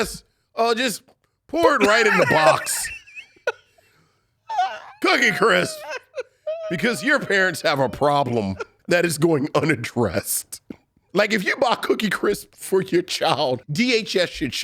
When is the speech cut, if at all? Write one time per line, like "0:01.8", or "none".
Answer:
0:08.7
0:11.1
0:13.7

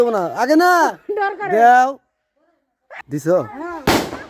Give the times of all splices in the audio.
0:02.9

